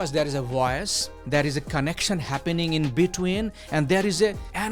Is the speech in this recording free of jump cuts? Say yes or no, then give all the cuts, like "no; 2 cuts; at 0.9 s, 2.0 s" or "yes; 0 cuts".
no; 1 cut; at 1.1 s